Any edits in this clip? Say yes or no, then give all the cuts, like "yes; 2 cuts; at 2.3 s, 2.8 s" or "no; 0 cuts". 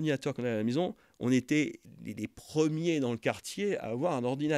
no; 0 cuts